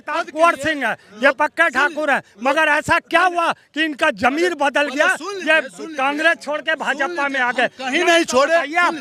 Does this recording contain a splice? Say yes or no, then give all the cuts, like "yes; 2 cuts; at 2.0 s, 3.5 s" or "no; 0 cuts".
no; 0 cuts